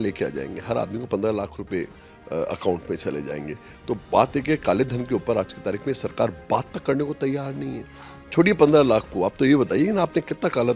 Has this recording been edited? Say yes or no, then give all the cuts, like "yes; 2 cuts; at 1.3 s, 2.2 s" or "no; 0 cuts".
no; 0 cuts